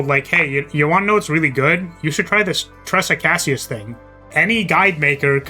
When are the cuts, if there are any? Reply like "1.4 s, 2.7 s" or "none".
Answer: 4.3 s